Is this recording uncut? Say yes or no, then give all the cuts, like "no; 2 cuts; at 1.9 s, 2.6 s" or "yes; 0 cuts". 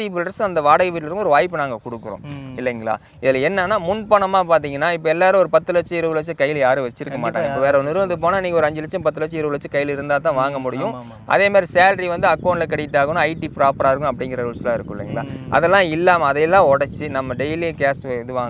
yes; 0 cuts